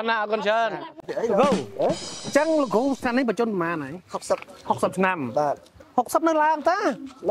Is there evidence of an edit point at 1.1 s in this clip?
yes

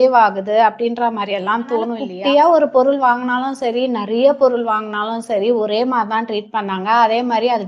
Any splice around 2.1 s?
yes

